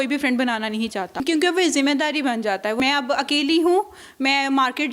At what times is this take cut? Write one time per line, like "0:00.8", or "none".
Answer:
0:01.1
0:02.8